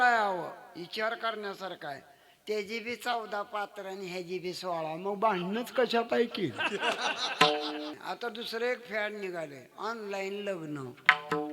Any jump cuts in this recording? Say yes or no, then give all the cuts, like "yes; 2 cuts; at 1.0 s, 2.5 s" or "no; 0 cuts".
yes; 1 cut; at 8.0 s